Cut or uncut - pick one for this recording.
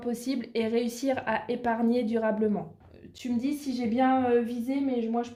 uncut